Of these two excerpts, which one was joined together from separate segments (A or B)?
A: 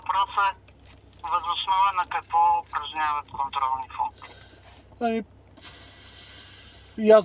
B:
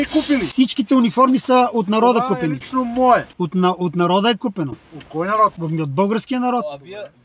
B